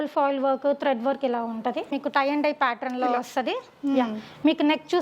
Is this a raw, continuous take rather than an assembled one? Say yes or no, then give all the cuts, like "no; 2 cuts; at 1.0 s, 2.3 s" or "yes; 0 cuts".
no; 1 cut; at 2.0 s